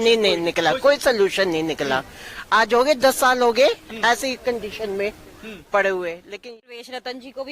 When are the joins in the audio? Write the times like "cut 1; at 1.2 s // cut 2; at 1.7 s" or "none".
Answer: cut 1; at 6.3 s